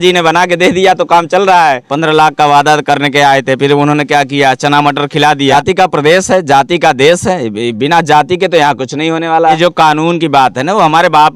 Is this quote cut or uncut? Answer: cut